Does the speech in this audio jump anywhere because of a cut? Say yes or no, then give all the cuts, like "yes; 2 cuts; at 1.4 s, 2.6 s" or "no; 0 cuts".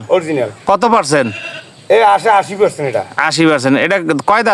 no; 0 cuts